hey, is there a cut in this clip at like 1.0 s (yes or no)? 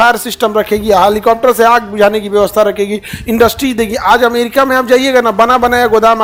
no